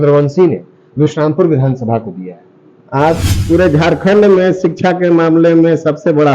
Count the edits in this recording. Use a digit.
1